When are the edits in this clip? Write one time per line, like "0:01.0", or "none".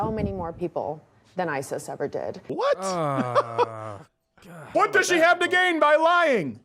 0:02.4
0:04.7